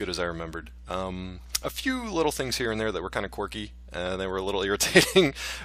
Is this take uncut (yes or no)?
yes